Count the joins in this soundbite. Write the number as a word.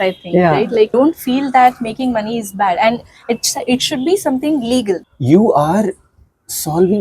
two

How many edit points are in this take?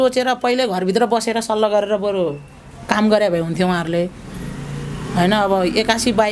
zero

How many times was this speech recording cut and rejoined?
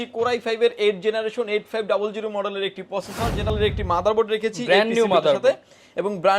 one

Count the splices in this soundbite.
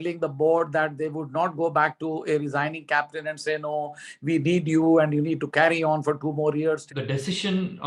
one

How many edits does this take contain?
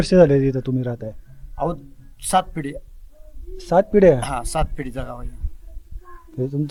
zero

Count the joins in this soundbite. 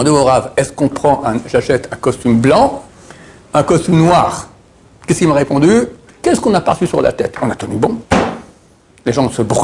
one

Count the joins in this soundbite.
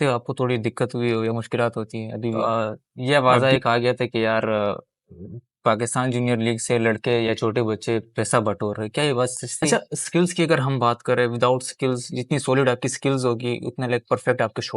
two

